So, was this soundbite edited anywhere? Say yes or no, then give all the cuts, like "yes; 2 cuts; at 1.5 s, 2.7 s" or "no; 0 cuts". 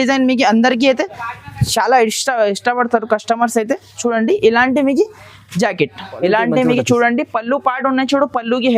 yes; 1 cut; at 6.0 s